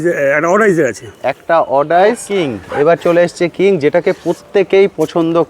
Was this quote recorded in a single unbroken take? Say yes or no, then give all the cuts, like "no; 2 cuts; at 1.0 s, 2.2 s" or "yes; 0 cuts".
no; 1 cut; at 2.3 s